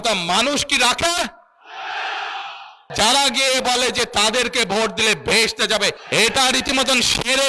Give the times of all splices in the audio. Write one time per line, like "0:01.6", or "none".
0:02.9
0:06.0